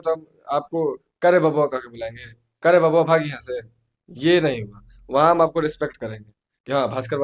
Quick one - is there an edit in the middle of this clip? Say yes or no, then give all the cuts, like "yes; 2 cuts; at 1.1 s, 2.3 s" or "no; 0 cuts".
no; 0 cuts